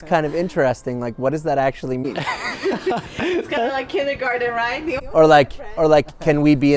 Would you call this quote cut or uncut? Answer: uncut